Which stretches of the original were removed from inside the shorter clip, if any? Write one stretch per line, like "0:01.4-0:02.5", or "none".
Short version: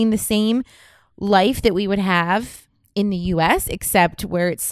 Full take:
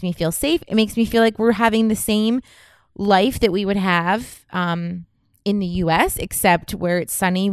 0:04.4-0:05.1